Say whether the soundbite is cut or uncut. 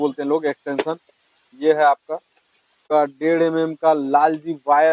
cut